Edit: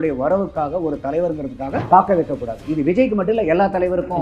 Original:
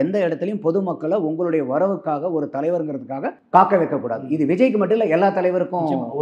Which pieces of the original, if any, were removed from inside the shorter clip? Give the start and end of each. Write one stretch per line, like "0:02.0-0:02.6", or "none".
0:03.3-0:03.5